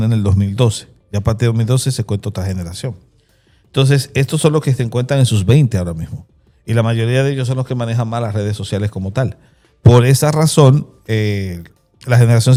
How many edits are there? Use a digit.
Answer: 0